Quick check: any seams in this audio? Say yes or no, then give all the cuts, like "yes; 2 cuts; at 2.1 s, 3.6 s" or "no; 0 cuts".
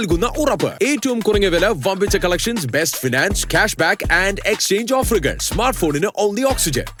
no; 0 cuts